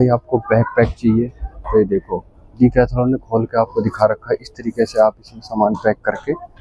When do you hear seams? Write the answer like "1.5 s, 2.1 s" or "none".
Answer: none

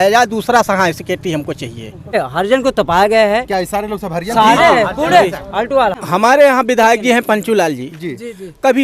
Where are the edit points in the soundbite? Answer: 2.2 s, 5.9 s

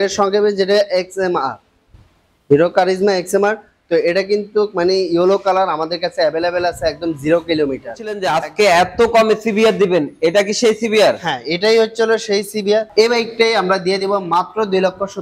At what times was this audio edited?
8.2 s, 12.9 s

